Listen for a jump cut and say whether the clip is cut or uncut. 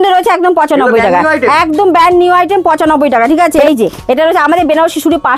cut